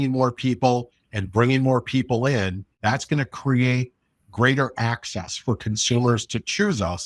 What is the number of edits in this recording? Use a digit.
1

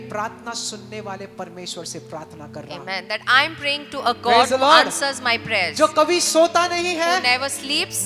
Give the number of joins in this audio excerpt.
0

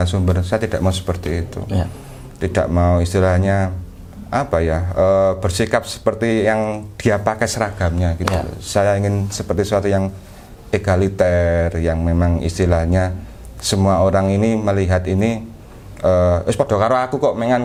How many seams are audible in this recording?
0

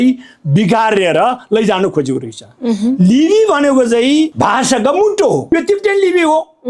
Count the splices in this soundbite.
1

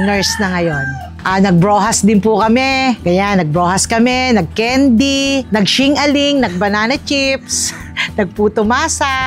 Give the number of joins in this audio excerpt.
1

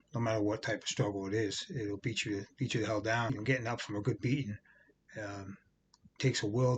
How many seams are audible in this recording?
1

